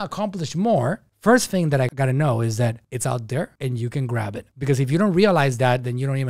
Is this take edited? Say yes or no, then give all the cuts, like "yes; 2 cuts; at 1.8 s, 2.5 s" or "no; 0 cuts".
no; 0 cuts